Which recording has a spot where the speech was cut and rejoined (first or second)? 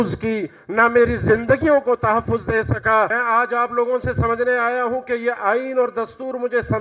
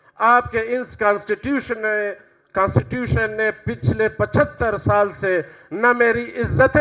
first